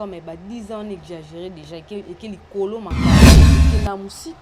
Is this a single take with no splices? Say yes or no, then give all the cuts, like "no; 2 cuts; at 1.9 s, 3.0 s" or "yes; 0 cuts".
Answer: no; 1 cut; at 2.9 s